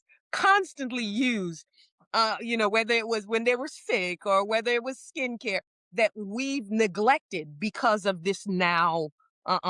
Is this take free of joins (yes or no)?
yes